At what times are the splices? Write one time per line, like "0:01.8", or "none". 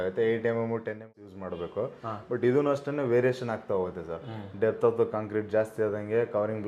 0:01.1